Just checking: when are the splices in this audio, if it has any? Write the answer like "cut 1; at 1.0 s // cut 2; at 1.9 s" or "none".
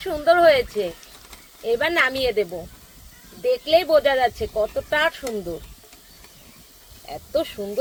none